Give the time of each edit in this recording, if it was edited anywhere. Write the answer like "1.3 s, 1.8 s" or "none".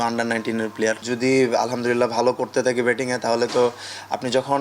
1.0 s

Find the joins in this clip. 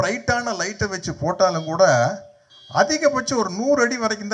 none

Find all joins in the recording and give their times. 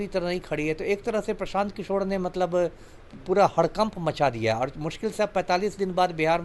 none

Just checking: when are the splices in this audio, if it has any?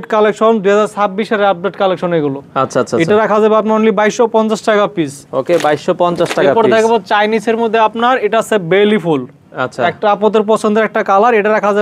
none

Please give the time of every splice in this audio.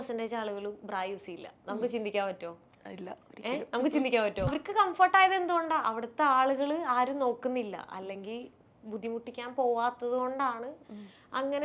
4.5 s

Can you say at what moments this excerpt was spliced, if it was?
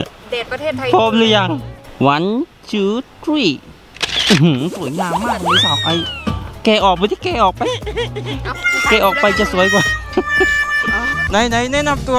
11.1 s

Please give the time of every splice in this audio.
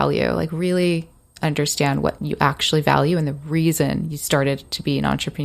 2.2 s

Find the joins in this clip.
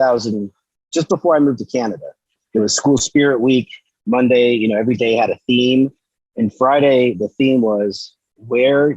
2.4 s

